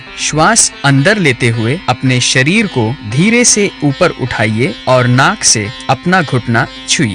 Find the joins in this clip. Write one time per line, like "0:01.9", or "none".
0:03.0
0:04.8
0:05.7